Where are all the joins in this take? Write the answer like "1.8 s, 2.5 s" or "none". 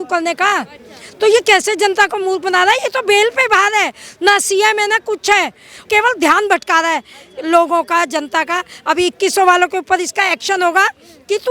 5.8 s